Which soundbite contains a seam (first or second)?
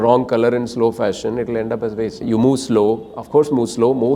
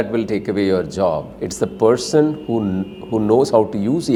first